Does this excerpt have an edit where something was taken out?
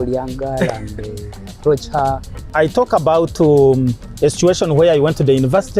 yes; 1 cut; at 2.5 s

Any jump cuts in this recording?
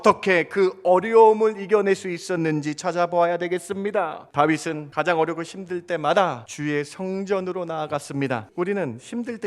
yes; 4 cuts; at 4.2 s, 4.8 s, 6.5 s, 8.5 s

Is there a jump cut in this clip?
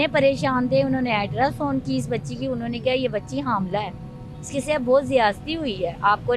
no; 0 cuts

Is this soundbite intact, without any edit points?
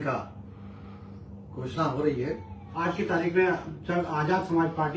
no; 1 cut; at 2.7 s

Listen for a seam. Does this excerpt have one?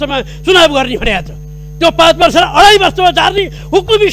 no; 0 cuts

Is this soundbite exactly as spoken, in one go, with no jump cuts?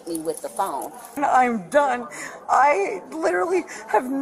no; 1 cut; at 1.2 s

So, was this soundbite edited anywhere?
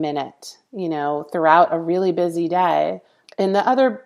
yes; 1 cut; at 3.1 s

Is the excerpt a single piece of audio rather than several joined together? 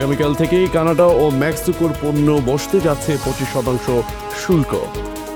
yes; 0 cuts

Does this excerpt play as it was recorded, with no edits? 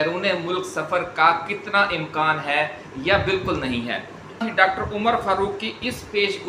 no; 1 cut; at 4.4 s

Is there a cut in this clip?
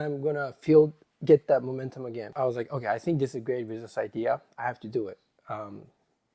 yes; 1 cut; at 2.3 s

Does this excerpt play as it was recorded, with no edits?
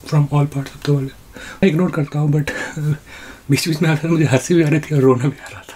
no; 1 cut; at 1.6 s

